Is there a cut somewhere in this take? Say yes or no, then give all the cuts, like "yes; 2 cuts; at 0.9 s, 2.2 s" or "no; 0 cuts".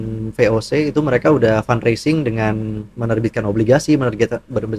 no; 0 cuts